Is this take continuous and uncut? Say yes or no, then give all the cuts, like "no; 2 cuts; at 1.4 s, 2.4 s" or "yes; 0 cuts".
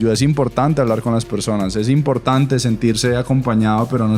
yes; 0 cuts